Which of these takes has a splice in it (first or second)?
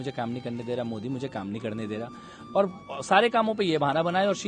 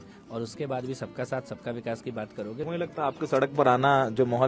second